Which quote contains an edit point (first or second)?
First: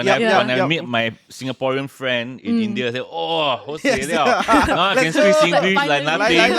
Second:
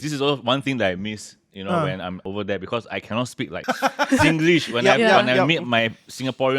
second